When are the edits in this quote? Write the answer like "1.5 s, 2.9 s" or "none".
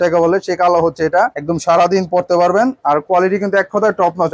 none